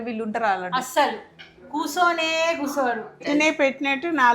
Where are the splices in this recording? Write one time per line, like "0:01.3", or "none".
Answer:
0:03.2

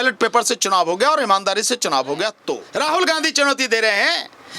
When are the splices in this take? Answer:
0:02.6

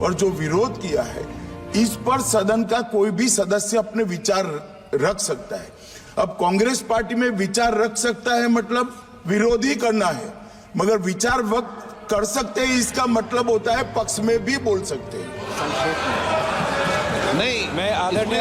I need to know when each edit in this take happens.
none

